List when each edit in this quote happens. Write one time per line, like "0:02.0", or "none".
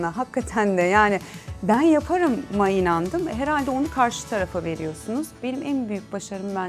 0:05.3